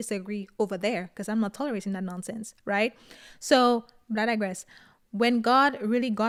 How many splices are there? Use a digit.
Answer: 0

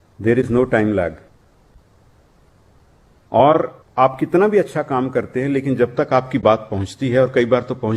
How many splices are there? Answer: 0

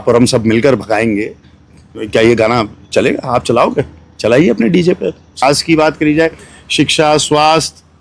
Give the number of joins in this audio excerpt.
1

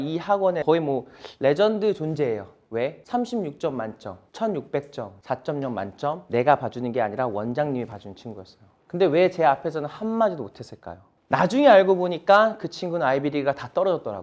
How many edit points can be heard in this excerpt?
1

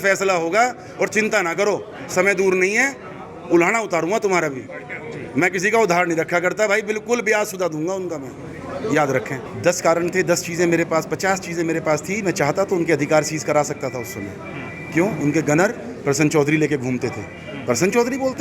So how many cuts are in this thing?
1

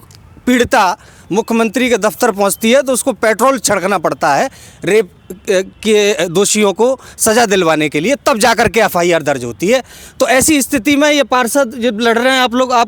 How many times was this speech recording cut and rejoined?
0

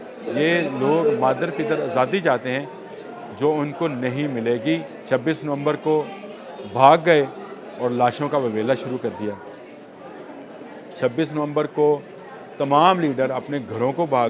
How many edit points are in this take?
1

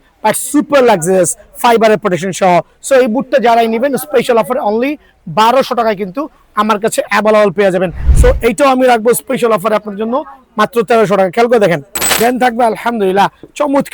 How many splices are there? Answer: 2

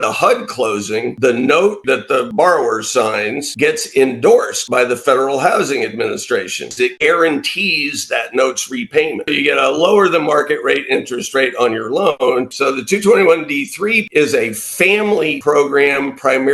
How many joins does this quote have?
9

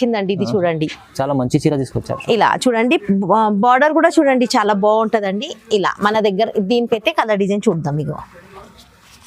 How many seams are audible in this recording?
0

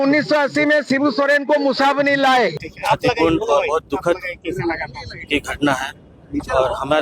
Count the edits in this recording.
1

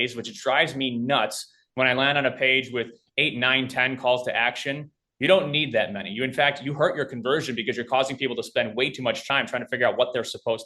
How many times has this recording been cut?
1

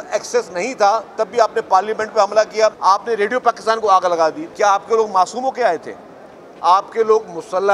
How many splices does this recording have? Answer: 2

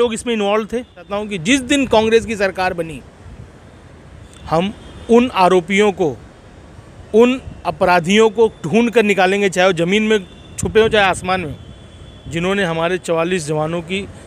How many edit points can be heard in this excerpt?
1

